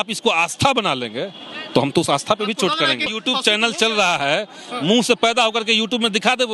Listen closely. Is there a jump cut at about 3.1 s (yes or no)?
yes